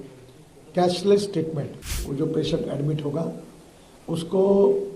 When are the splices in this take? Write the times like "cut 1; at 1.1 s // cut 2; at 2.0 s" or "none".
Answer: cut 1; at 2.0 s